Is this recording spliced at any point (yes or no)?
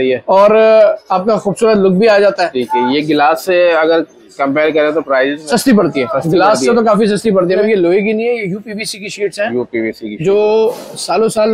yes